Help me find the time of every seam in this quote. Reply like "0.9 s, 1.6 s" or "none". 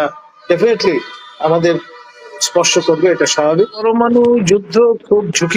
3.8 s